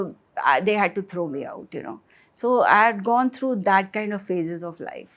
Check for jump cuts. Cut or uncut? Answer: uncut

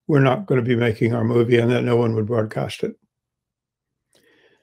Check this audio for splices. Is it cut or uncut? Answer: uncut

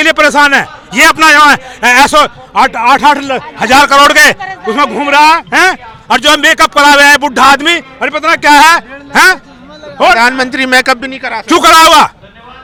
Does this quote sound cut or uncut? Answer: uncut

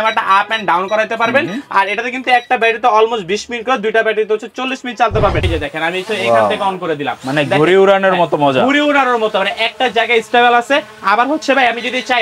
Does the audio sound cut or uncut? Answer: cut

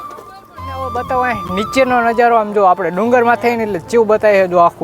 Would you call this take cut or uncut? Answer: uncut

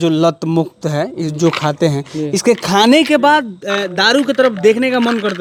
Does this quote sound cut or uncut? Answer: uncut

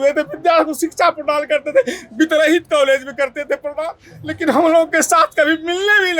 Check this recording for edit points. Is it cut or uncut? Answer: uncut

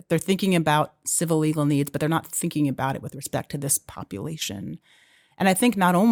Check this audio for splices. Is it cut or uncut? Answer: uncut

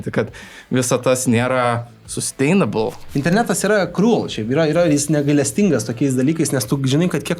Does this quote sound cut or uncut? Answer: cut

